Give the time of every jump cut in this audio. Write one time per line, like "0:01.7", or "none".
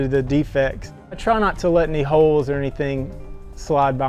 0:01.1